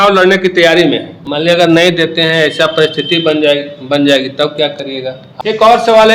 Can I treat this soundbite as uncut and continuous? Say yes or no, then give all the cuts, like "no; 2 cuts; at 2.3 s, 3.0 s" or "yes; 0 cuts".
no; 2 cuts; at 1.2 s, 5.3 s